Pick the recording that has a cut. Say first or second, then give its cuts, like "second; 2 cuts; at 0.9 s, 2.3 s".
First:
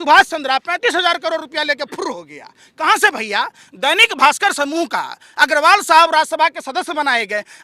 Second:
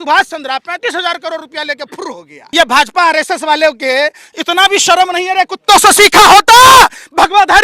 second; 1 cut; at 2.3 s